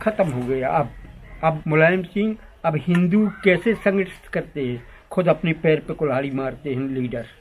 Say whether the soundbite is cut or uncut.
cut